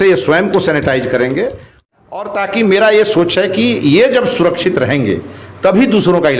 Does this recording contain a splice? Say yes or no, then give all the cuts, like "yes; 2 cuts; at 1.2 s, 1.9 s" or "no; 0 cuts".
yes; 1 cut; at 1.8 s